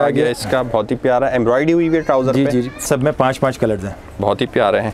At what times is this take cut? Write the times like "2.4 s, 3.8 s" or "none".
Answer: 2.8 s